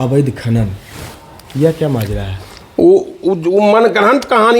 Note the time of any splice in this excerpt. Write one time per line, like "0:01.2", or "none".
none